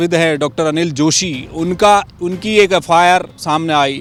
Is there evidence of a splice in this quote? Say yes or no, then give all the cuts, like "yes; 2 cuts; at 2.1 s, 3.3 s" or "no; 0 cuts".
no; 0 cuts